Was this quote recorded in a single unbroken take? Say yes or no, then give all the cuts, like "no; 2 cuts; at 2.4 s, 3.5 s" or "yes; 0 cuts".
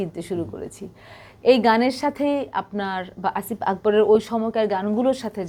yes; 0 cuts